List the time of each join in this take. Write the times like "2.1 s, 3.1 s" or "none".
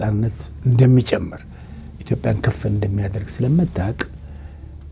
none